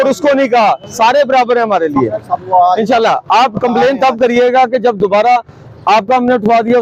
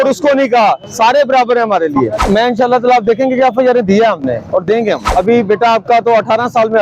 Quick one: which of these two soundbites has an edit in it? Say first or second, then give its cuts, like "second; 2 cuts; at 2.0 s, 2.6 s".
second; 2 cuts; at 2.2 s, 5.0 s